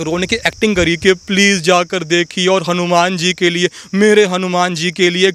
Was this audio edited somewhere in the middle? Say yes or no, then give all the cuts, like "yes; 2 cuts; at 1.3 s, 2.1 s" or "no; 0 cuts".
no; 0 cuts